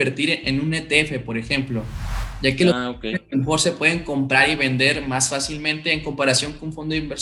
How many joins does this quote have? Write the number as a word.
zero